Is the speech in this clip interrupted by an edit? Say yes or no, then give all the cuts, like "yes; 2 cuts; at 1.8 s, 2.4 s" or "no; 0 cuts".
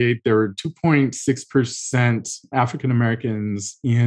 no; 0 cuts